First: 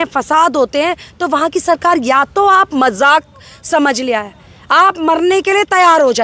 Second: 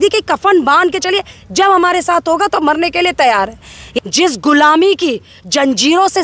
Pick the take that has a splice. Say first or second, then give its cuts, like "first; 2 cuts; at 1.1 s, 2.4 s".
second; 1 cut; at 3.9 s